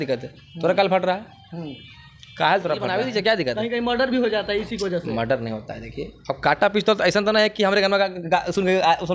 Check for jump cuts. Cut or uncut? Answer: cut